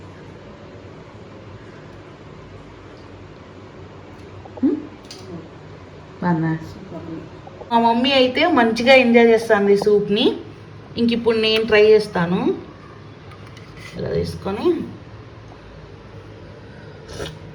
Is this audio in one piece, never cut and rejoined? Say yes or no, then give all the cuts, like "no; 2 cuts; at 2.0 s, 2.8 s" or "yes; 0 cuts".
no; 1 cut; at 7.7 s